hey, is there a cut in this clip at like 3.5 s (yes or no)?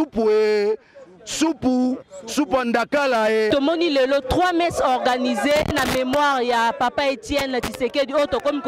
yes